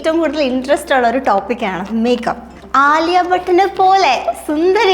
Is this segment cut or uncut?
cut